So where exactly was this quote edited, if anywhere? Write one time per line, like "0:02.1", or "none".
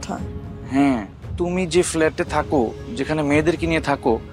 0:01.2